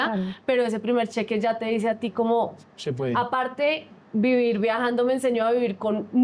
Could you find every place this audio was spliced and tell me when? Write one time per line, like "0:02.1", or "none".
none